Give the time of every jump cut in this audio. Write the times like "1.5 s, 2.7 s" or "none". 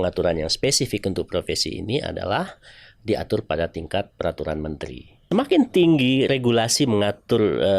5.1 s